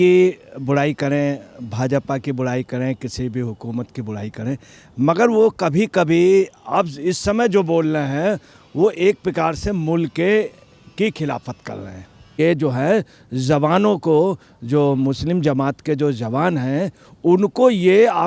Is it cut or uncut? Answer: cut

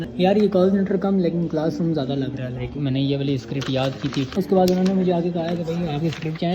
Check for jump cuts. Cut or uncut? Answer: cut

